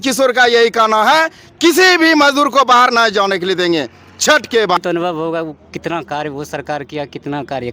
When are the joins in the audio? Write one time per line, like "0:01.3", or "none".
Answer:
0:04.8